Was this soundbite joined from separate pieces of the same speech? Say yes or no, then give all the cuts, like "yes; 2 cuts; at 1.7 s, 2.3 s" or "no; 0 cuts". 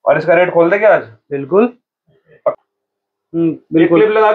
yes; 1 cut; at 2.6 s